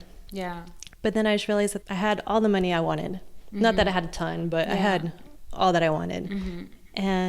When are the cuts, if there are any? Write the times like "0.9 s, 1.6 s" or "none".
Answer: 1.0 s, 1.8 s